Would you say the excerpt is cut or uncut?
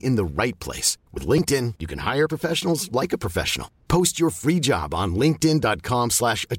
uncut